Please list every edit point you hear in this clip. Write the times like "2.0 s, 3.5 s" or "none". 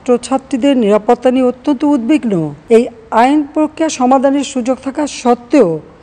2.5 s